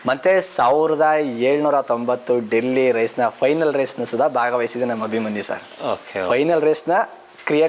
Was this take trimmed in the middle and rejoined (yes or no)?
no